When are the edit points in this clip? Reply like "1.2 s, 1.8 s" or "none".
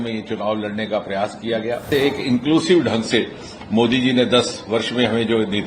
1.9 s